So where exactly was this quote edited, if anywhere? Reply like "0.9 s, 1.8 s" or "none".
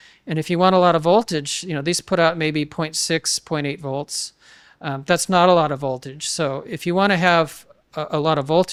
none